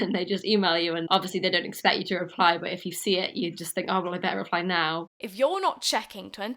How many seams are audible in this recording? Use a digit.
2